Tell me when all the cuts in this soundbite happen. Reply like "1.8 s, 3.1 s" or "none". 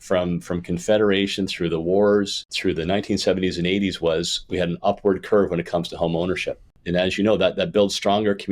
2.5 s, 6.7 s